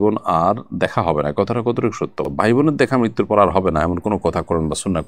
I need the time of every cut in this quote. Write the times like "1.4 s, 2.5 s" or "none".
none